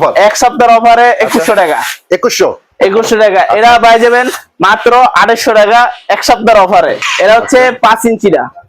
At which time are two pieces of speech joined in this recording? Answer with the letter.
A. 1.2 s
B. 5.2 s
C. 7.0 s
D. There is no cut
C